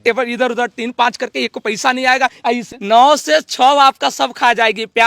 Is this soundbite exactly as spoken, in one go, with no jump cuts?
no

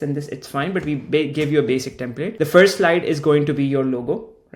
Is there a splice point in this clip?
no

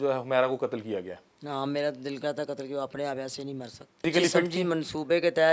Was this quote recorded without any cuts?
no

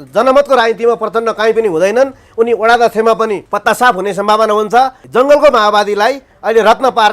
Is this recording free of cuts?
no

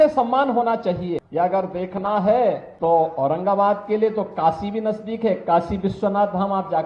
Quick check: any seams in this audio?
yes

